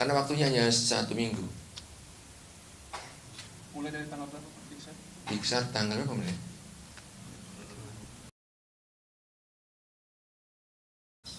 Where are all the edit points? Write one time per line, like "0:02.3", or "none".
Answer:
none

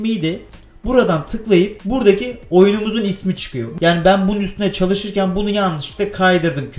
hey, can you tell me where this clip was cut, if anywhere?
0:01.8
0:03.6

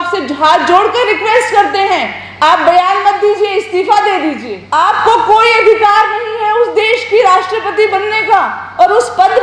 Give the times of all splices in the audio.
0:04.5

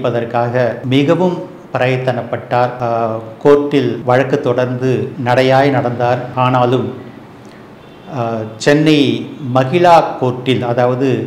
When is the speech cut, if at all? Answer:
0:00.8
0:02.8
0:04.0
0:05.1
0:06.3

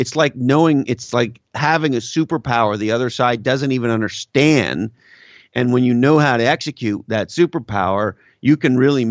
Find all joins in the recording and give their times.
none

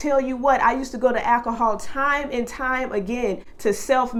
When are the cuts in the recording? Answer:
none

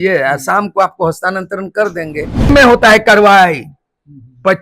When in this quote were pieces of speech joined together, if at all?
0:02.5

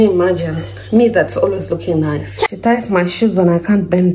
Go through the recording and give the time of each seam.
0:02.5

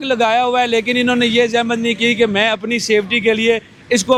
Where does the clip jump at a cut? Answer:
none

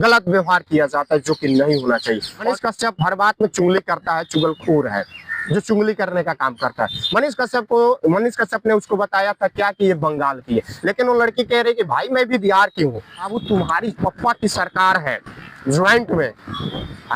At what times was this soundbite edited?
0:02.4
0:13.4

